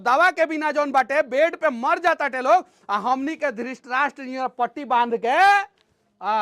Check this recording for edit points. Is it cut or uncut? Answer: uncut